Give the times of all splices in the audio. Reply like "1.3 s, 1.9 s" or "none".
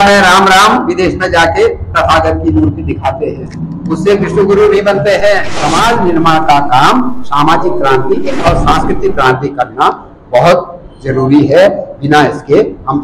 5.6 s

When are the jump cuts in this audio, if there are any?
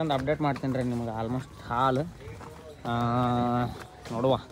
none

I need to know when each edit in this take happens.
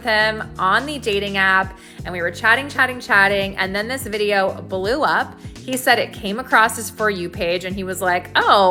none

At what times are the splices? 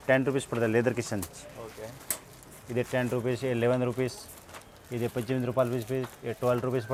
none

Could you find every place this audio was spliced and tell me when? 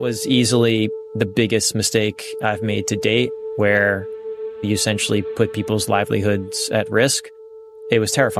none

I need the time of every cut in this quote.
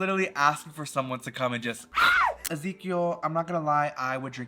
2.4 s

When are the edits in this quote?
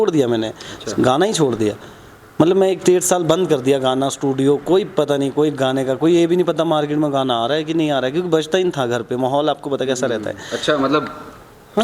none

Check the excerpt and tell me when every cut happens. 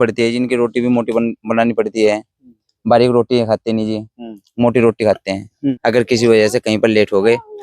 5.8 s

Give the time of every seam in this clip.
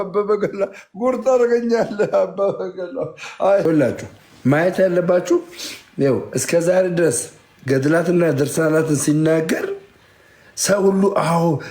3.6 s

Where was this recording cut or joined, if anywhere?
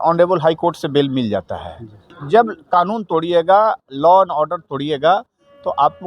2.2 s

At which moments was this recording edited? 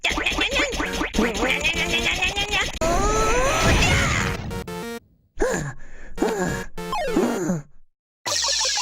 2.8 s, 4.7 s

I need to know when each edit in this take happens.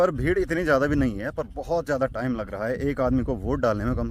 none

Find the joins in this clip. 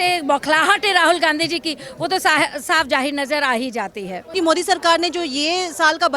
4.3 s

